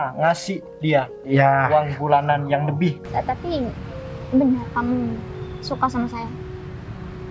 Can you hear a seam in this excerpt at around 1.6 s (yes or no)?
no